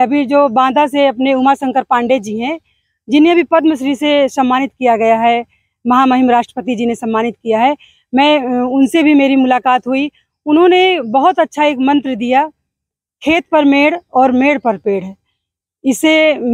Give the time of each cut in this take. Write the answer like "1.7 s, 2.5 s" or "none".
none